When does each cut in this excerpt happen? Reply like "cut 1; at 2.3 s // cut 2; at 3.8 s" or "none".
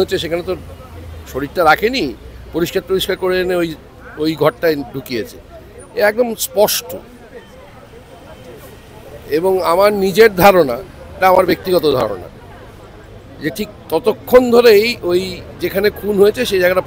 none